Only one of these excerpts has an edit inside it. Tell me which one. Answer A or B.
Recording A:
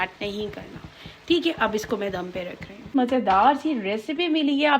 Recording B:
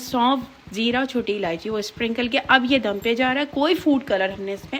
A